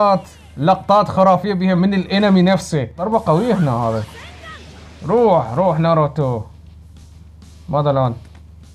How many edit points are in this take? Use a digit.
1